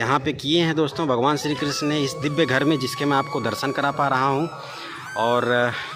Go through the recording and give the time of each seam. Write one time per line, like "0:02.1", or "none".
none